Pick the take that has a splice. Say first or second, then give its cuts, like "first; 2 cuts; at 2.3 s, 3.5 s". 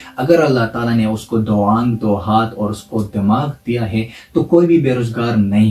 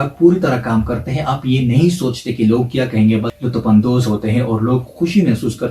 second; 1 cut; at 3.3 s